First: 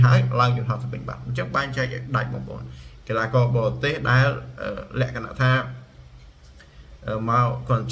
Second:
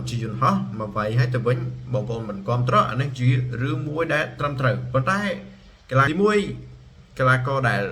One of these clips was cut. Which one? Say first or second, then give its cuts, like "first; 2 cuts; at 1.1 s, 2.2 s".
second; 1 cut; at 6.1 s